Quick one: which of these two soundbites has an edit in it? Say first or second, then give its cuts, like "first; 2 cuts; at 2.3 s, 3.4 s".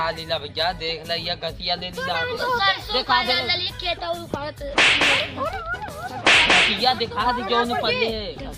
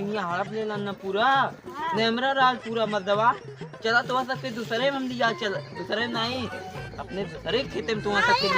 first; 1 cut; at 2.4 s